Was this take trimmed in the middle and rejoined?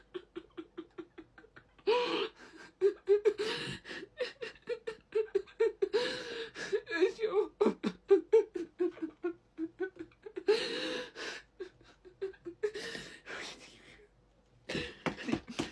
no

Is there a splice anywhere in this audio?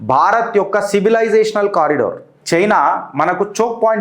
yes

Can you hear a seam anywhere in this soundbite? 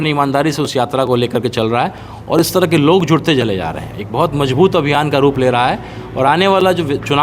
no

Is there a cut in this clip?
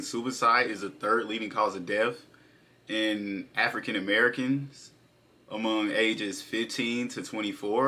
no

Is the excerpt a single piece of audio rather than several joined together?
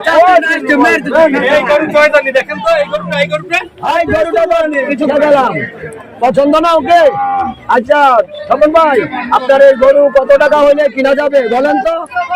yes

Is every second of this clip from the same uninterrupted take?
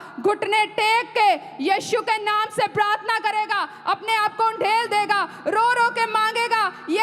yes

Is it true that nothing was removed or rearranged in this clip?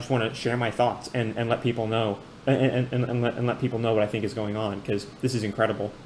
no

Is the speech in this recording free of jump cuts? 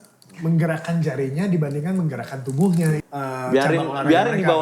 no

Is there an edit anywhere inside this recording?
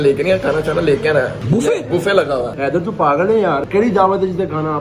yes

